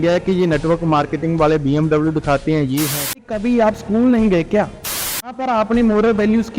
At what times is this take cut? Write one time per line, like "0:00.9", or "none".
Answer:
0:03.3
0:05.2